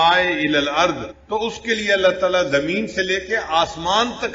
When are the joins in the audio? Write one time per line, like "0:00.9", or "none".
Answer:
0:01.1